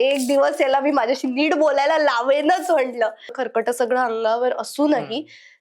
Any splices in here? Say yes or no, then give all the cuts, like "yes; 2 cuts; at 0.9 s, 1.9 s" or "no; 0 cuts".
yes; 1 cut; at 3.4 s